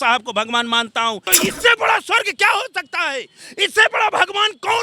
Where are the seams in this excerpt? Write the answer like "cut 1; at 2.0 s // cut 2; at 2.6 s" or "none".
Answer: cut 1; at 1.3 s